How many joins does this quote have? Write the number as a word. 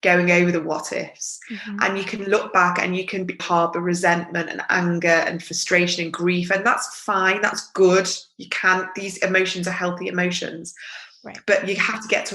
one